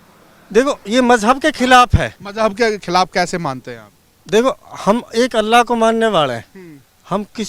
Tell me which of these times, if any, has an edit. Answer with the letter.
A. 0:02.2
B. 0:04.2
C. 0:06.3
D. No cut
A